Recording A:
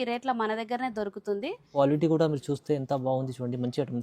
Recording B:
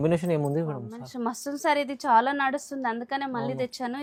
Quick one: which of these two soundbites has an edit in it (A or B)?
A